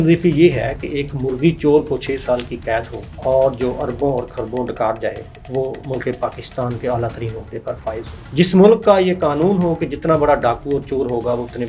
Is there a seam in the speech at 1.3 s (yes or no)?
no